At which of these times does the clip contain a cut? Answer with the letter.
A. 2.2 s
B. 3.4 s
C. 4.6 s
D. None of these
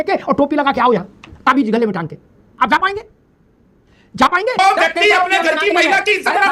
C